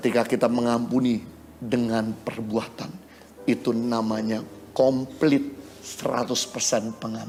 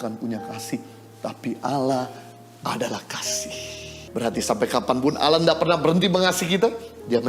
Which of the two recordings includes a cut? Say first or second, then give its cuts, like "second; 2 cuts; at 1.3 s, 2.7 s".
second; 1 cut; at 4.0 s